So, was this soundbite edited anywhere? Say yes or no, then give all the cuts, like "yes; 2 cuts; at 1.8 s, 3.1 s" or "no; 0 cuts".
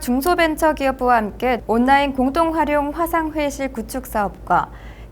yes; 1 cut; at 1.6 s